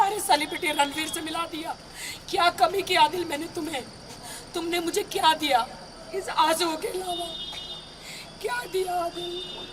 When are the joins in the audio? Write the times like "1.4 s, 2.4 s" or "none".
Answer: none